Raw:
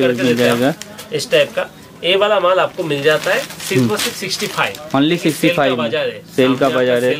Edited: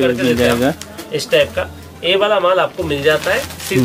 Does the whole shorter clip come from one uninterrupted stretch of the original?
yes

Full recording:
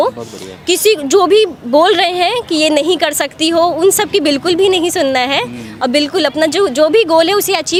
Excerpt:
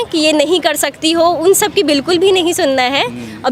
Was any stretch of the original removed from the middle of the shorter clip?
no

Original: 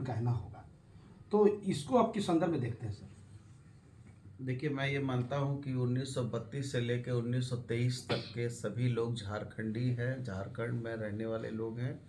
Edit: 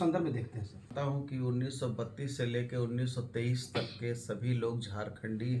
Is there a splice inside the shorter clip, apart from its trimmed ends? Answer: yes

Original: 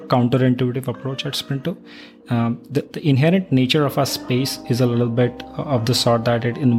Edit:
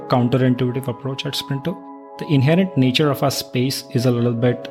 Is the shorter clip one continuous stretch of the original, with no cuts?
no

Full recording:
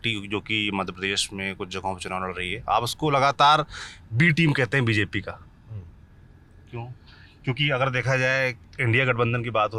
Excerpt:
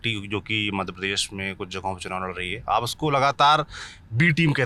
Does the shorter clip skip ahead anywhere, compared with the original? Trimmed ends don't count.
no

